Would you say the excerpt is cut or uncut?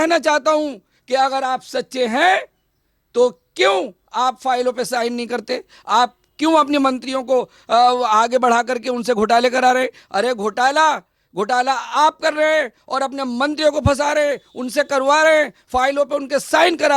uncut